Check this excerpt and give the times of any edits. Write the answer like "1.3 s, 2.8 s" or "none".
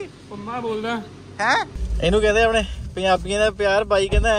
1.8 s